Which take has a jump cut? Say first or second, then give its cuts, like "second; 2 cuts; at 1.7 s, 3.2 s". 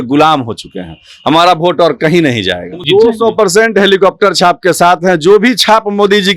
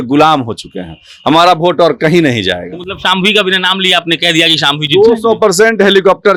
first; 1 cut; at 2.8 s